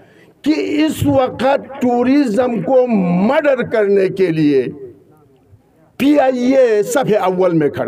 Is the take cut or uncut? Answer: uncut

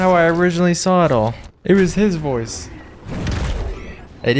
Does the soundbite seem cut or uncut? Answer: cut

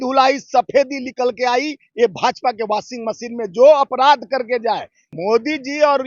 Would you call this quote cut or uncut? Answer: cut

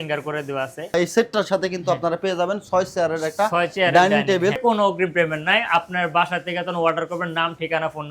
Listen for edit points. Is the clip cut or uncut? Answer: cut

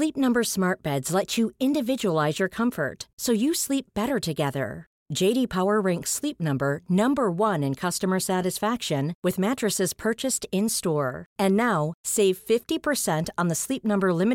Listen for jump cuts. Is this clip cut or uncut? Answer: uncut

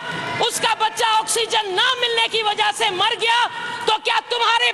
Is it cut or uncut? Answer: uncut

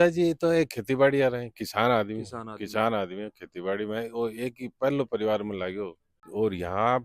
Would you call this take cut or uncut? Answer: cut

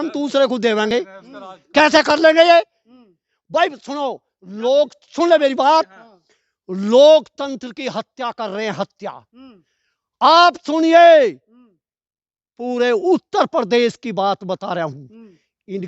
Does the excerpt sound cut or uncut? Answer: uncut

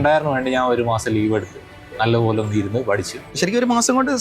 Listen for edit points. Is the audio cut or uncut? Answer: cut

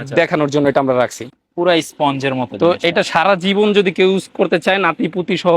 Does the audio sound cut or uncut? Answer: cut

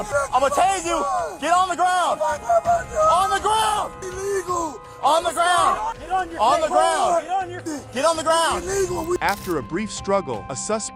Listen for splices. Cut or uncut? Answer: uncut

